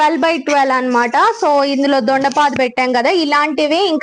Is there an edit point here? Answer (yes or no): no